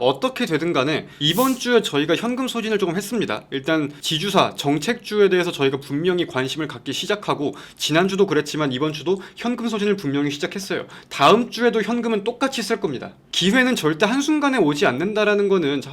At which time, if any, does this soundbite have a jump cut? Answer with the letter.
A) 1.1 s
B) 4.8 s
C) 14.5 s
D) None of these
A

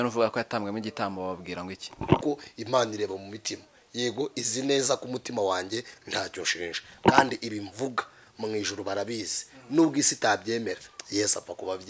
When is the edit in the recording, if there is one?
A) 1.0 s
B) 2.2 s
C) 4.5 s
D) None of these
B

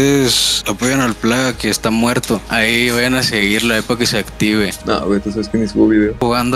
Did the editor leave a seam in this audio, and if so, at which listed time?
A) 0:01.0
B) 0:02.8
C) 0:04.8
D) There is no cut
C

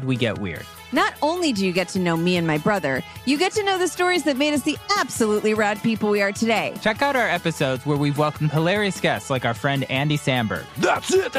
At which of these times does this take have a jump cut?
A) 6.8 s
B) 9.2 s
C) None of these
A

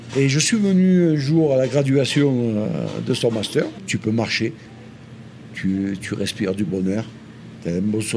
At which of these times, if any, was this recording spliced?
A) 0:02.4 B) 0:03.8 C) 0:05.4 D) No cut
B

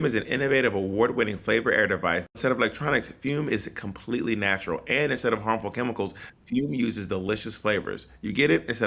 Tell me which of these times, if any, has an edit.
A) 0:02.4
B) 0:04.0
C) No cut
A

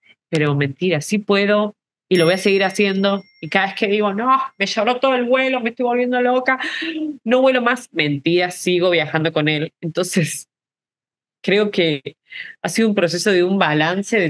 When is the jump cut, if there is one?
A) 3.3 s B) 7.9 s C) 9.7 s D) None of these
D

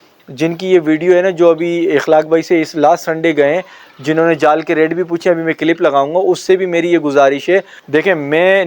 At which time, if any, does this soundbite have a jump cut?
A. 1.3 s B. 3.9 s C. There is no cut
C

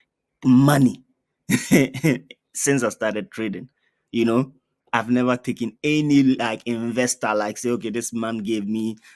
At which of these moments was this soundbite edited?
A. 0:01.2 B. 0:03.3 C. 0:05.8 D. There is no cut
D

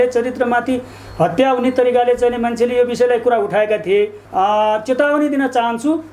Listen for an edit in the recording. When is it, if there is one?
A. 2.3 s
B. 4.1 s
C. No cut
B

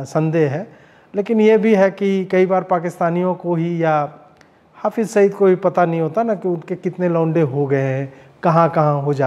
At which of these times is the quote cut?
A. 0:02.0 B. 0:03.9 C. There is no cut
C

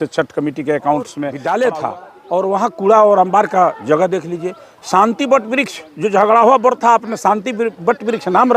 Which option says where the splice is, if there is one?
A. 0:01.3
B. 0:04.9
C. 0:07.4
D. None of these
A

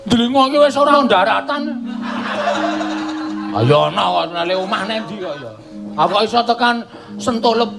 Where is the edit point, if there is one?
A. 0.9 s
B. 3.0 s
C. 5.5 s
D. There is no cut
A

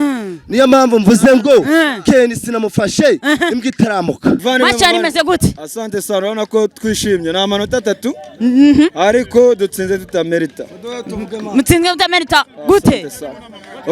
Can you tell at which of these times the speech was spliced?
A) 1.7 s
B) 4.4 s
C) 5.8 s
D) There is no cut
B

